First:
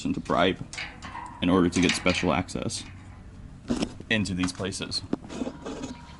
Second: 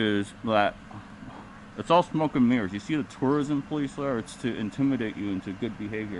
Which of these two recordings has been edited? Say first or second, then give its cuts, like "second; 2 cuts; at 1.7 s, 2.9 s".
first; 1 cut; at 5.2 s